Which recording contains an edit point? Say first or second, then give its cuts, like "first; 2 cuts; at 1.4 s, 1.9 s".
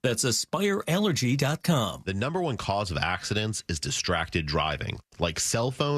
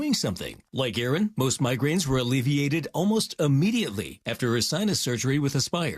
first; 1 cut; at 2.0 s